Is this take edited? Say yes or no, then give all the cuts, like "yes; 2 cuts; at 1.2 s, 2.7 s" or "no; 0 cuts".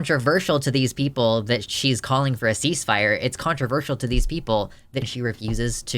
yes; 1 cut; at 5.1 s